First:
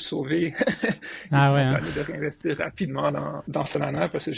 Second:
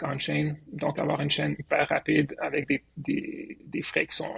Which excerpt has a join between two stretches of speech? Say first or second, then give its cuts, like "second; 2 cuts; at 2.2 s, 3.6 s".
first; 1 cut; at 3.4 s